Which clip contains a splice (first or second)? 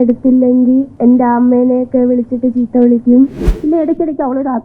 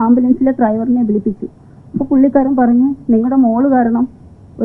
first